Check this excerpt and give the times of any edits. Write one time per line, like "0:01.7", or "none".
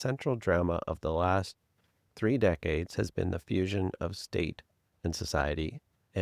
none